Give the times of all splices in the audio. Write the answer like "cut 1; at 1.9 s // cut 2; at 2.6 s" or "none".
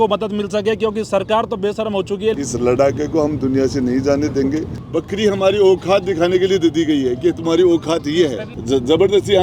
cut 1; at 2.3 s // cut 2; at 4.8 s // cut 3; at 8.5 s